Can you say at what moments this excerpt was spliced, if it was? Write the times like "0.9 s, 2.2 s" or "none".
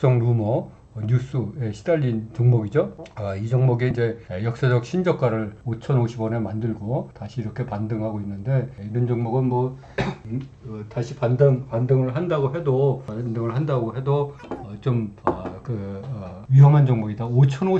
none